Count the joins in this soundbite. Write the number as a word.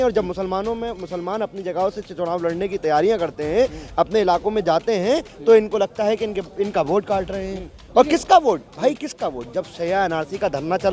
zero